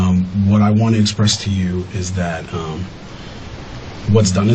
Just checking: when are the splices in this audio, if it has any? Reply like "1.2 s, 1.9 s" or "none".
none